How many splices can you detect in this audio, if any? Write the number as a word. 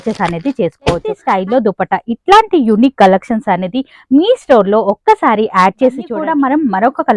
two